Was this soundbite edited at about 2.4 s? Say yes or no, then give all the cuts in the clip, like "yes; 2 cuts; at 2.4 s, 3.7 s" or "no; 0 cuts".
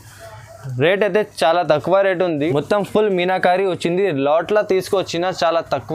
yes; 1 cut; at 2.4 s